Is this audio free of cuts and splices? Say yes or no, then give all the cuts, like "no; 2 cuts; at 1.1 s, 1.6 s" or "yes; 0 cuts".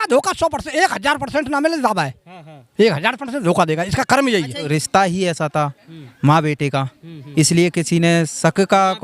no; 1 cut; at 4.6 s